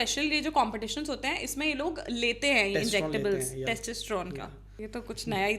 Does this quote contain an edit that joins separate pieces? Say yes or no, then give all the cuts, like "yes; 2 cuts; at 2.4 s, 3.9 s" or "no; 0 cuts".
yes; 1 cut; at 4.6 s